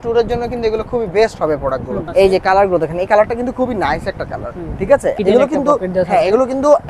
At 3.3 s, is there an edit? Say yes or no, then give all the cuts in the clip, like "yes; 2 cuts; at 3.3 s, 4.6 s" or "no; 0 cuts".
no; 2 cuts; at 2.0 s, 5.2 s